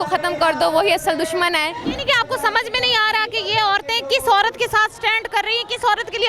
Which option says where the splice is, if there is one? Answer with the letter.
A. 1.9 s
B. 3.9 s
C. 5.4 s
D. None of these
A